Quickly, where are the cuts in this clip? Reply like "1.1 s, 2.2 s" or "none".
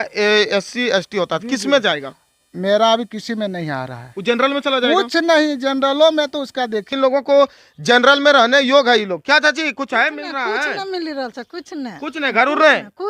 6.9 s